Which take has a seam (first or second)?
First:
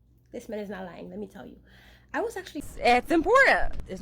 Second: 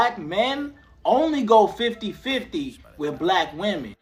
first